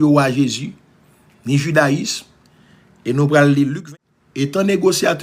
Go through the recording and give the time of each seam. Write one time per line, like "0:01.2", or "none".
0:03.8